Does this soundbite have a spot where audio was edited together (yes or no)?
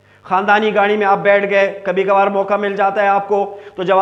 no